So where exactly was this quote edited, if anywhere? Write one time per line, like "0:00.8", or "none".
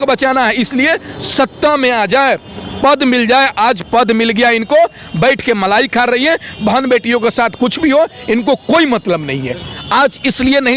0:09.7